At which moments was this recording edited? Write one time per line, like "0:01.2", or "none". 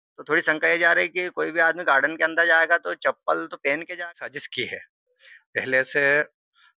0:04.1